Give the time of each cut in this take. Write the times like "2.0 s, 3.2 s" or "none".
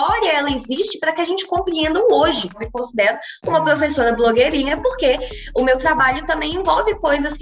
2.6 s